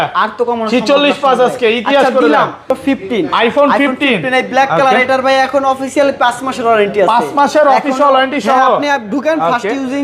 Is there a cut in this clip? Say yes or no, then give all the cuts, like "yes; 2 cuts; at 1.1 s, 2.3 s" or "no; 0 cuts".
yes; 1 cut; at 2.8 s